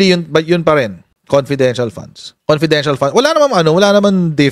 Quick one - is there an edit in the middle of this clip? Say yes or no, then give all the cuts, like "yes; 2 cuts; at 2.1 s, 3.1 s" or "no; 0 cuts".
yes; 1 cut; at 2.3 s